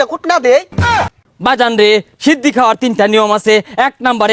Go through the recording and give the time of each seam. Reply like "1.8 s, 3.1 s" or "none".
1.0 s